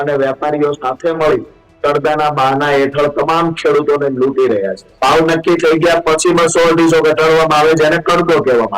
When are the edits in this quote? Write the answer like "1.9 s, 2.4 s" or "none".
4.9 s